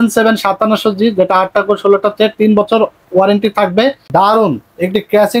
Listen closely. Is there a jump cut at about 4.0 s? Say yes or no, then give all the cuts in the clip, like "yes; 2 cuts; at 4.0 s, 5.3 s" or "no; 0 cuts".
yes; 1 cut; at 4.0 s